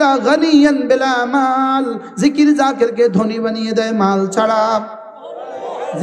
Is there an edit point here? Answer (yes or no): no